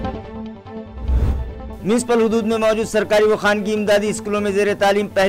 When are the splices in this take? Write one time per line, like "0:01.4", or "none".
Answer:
0:01.6